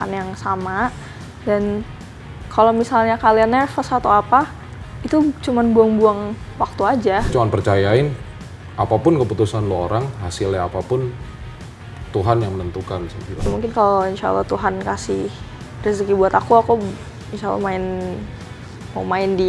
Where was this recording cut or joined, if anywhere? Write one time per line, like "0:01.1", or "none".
0:07.3
0:13.5